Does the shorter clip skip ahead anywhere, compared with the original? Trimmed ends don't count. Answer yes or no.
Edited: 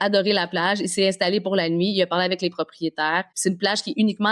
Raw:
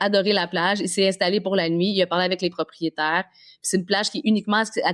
yes